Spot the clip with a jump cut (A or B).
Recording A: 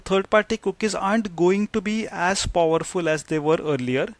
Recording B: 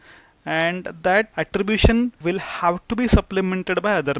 B